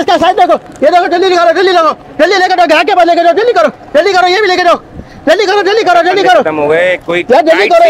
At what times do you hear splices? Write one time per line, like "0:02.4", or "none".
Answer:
none